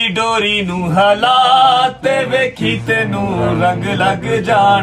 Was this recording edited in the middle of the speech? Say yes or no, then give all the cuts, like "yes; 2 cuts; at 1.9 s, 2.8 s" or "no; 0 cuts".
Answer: no; 0 cuts